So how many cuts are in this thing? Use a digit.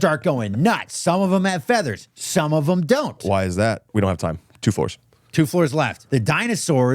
1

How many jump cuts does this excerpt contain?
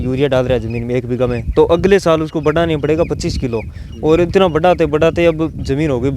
0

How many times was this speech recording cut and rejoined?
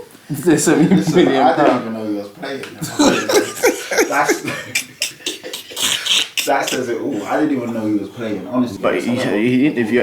1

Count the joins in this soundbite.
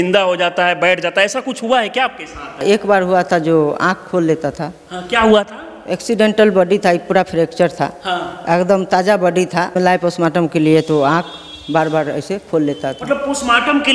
2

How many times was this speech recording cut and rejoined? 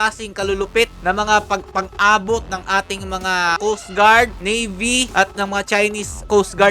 2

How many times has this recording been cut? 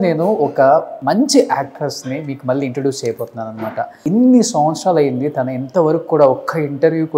2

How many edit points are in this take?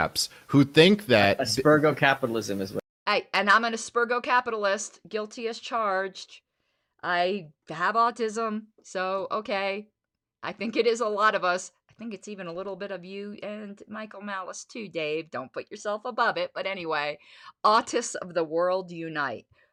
0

